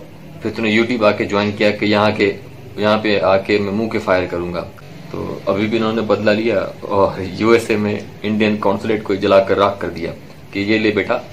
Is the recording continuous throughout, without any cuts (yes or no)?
no